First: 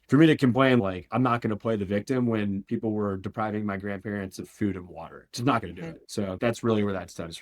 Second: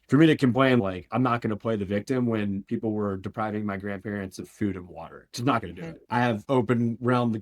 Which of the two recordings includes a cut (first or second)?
second